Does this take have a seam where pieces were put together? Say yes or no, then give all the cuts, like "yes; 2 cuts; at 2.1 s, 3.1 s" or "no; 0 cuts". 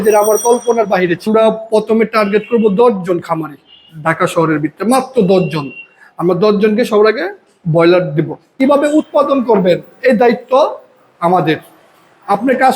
yes; 2 cuts; at 1.3 s, 8.6 s